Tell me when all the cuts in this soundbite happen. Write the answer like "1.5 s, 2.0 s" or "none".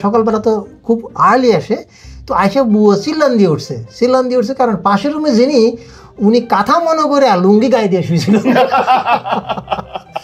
none